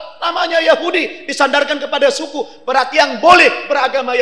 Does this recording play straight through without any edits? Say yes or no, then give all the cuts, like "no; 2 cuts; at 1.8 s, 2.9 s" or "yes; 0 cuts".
yes; 0 cuts